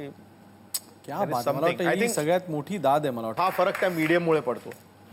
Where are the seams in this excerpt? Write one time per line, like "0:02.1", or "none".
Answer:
0:03.3